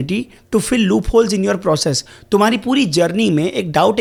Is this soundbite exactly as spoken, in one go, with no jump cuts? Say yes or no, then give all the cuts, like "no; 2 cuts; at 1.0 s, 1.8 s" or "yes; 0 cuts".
yes; 0 cuts